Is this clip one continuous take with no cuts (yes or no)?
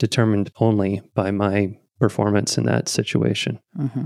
no